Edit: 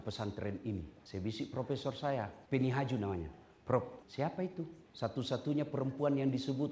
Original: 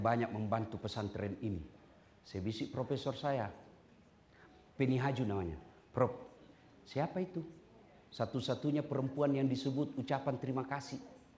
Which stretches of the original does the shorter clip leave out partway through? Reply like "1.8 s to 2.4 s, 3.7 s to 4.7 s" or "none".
1.7 s to 2.2 s, 3.6 s to 4.6 s, 6.7 s to 7.6 s